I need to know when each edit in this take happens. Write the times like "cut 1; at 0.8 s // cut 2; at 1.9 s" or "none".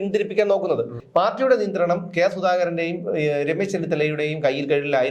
cut 1; at 1.0 s